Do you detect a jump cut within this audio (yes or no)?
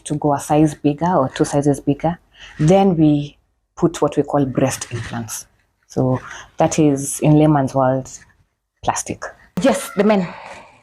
yes